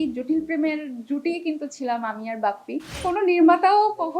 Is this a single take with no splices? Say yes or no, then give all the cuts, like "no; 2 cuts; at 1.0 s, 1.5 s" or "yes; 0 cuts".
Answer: no; 1 cut; at 3.0 s